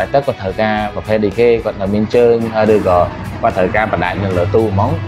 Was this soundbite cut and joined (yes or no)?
no